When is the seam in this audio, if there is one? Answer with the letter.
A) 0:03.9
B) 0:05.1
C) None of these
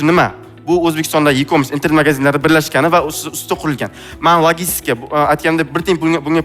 C